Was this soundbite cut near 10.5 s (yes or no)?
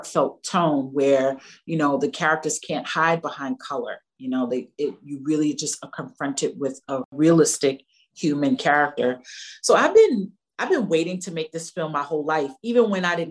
no